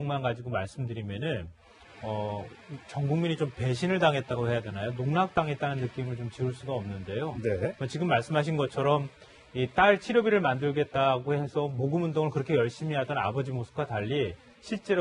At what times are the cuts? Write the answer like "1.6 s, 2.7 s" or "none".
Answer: 6.4 s